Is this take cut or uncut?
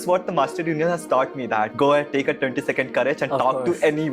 cut